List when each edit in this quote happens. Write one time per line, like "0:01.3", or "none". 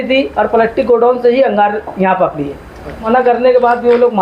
0:03.1